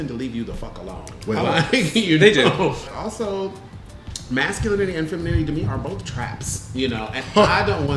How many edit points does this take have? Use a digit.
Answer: 1